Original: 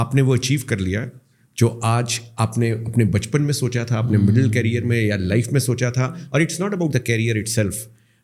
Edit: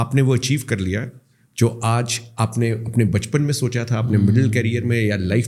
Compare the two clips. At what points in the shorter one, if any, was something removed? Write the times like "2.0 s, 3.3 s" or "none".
none